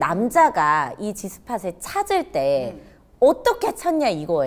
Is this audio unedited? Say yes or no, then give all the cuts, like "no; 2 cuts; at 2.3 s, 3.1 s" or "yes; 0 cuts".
yes; 0 cuts